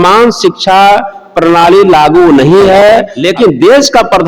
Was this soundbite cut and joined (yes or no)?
yes